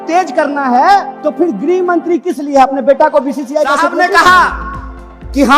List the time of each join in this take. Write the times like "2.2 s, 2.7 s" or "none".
1.2 s, 3.9 s